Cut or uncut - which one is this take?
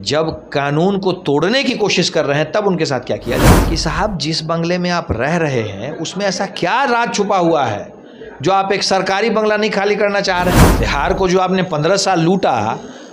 cut